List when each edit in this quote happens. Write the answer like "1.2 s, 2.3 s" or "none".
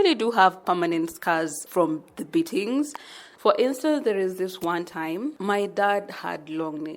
1.6 s, 3.2 s, 5.4 s